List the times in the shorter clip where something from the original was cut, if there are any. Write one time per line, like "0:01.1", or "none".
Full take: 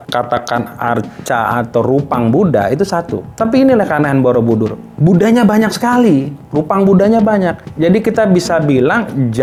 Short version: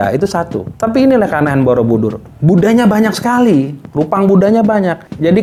none